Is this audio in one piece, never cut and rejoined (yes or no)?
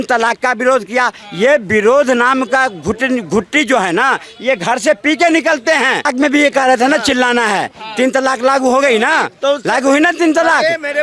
no